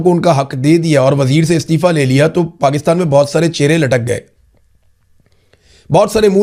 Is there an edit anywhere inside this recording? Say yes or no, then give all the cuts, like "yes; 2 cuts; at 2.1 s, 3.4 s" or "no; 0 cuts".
no; 0 cuts